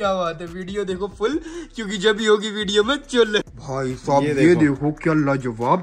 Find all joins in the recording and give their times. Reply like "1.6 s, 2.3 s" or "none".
3.4 s